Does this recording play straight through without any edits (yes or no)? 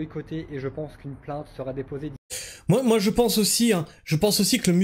yes